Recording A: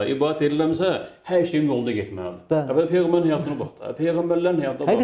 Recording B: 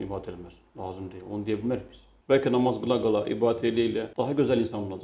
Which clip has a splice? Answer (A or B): B